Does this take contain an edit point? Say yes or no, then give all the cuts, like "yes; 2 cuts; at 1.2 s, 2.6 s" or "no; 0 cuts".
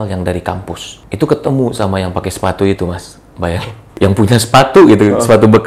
yes; 2 cuts; at 1.0 s, 3.8 s